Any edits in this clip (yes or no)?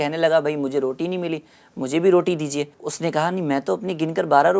yes